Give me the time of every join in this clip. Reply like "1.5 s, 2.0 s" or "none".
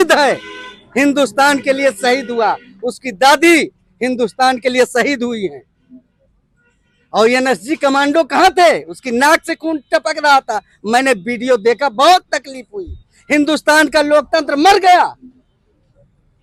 none